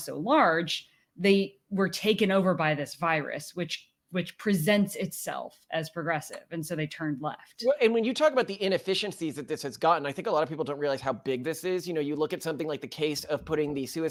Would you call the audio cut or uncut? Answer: uncut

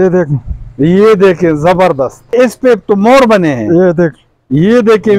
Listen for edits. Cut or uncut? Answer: cut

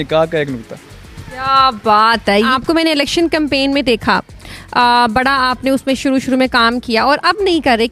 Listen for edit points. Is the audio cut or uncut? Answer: cut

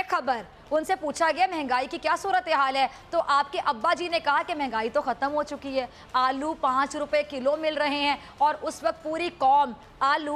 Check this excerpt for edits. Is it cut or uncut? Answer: uncut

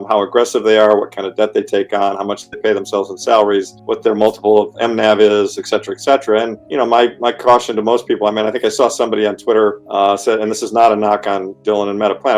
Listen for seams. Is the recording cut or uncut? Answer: cut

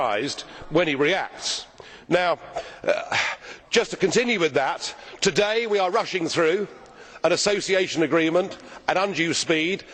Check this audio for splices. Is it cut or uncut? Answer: uncut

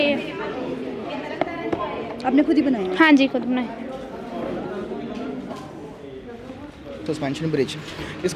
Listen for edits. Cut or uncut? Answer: cut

